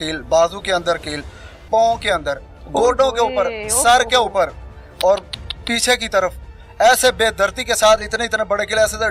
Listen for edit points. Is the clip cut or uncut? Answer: uncut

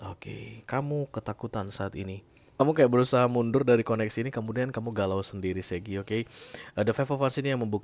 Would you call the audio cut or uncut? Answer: cut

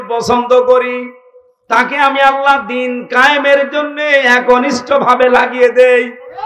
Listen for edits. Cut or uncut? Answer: uncut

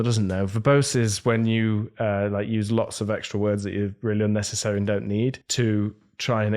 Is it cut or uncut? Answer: cut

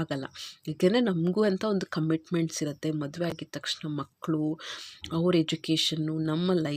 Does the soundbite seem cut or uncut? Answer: uncut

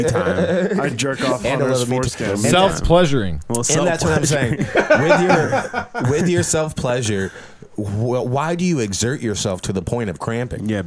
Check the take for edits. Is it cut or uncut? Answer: uncut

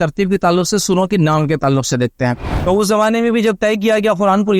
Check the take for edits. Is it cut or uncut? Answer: cut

